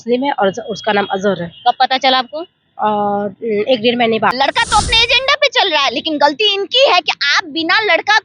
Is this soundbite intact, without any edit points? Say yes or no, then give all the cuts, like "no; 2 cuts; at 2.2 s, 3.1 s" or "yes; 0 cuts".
no; 1 cut; at 4.3 s